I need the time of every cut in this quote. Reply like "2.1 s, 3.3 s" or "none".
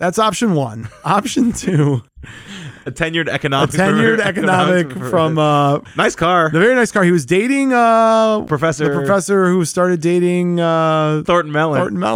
5.8 s, 8.4 s, 11.2 s